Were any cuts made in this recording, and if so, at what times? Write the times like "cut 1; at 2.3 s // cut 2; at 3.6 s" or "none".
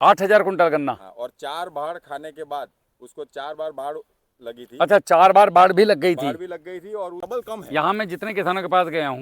cut 1; at 7.2 s